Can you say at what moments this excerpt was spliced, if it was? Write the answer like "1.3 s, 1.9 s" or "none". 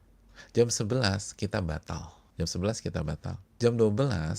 2.2 s, 3.4 s